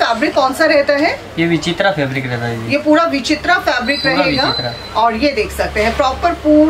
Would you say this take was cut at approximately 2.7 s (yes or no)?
no